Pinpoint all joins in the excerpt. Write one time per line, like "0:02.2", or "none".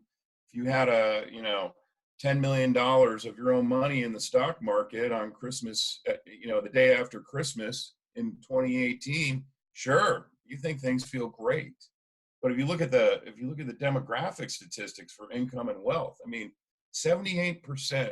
none